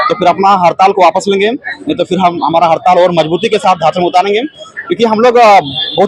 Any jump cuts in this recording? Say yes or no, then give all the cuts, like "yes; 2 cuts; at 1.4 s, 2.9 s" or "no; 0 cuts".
no; 0 cuts